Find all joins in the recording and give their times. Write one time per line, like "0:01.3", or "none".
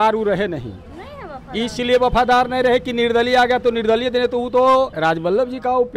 0:04.9